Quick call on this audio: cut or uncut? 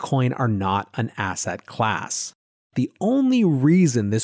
cut